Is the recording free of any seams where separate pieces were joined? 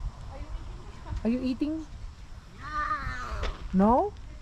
yes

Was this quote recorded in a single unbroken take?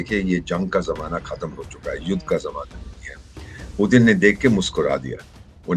yes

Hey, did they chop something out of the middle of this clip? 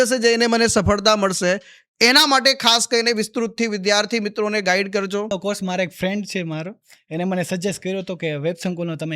yes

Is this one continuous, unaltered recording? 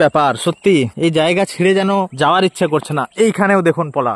no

